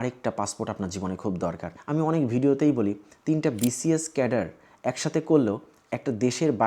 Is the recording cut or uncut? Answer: cut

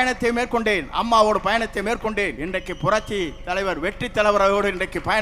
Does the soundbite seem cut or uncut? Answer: cut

